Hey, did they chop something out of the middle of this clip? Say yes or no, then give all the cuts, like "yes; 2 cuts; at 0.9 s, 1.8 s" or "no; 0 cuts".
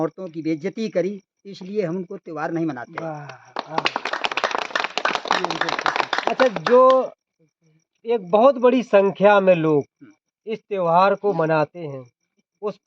no; 0 cuts